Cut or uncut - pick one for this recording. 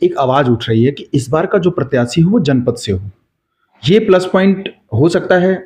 uncut